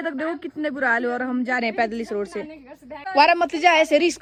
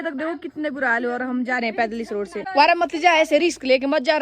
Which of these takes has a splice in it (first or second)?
second